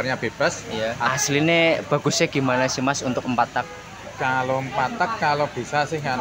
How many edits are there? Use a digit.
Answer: 1